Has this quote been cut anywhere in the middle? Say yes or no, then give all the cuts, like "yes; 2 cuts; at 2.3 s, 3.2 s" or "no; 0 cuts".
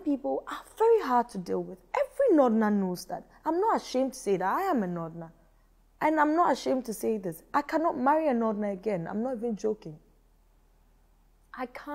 no; 0 cuts